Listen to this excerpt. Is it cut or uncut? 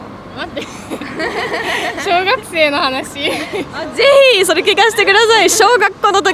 uncut